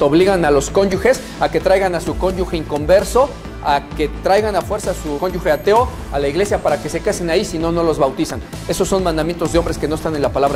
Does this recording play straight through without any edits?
no; 1 cut; at 5.2 s

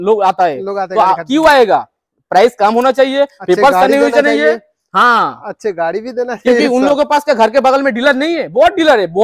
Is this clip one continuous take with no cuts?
yes; 0 cuts

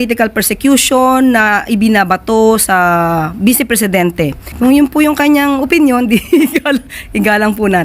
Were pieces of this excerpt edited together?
yes; 1 cut; at 4.5 s

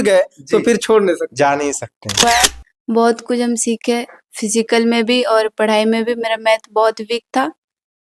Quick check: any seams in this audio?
yes; 1 cut; at 2.2 s

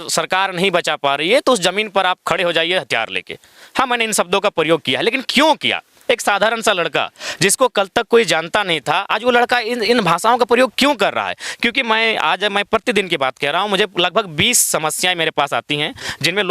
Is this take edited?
no; 0 cuts

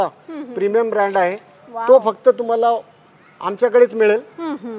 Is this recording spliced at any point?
no; 0 cuts

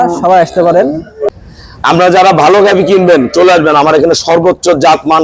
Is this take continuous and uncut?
no; 1 cut; at 1.3 s

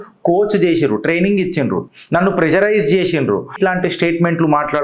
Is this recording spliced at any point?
yes; 1 cut; at 3.6 s

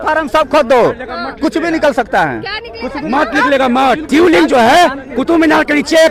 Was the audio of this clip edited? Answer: yes; 1 cut; at 4.0 s

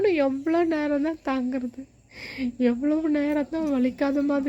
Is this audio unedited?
yes; 0 cuts

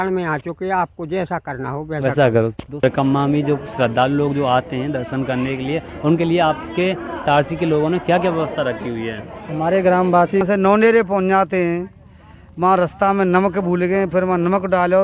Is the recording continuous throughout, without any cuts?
no; 2 cuts; at 2.8 s, 10.4 s

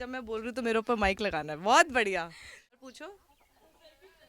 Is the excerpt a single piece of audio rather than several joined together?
no; 1 cut; at 2.8 s

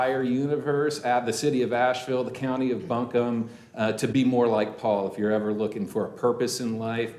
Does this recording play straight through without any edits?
yes; 0 cuts

